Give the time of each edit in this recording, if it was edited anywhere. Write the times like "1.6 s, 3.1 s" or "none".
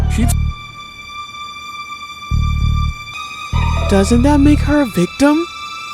3.1 s